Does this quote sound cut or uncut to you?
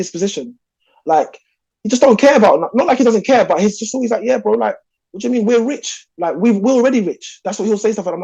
uncut